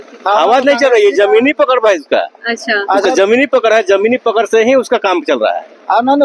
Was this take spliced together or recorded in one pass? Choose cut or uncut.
uncut